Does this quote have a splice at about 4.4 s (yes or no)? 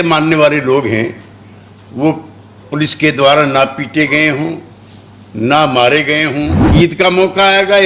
no